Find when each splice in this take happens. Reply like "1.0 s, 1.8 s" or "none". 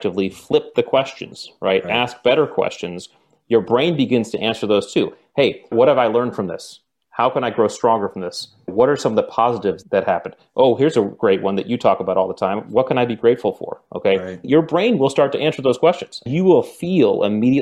5.7 s, 14.4 s, 16.2 s